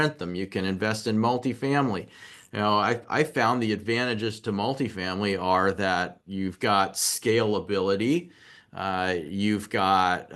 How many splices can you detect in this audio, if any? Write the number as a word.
zero